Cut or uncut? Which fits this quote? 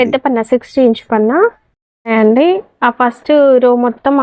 cut